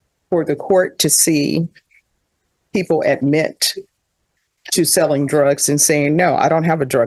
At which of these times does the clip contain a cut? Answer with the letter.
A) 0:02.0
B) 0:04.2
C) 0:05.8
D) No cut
D